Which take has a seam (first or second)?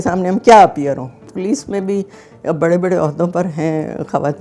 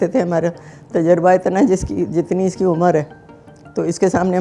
first